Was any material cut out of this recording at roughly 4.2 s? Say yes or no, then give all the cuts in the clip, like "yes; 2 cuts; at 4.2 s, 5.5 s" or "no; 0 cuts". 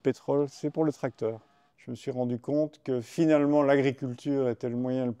no; 1 cut; at 1.5 s